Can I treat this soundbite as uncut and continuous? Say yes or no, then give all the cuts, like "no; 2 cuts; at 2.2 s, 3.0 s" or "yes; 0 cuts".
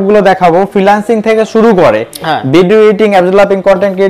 yes; 0 cuts